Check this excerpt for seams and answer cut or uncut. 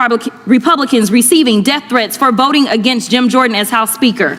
uncut